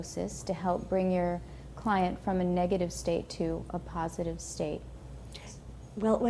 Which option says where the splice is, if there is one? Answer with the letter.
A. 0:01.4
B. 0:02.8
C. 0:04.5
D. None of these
A